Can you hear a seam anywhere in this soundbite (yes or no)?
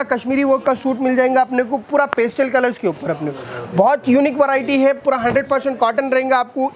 no